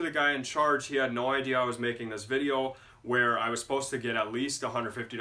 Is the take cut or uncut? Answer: uncut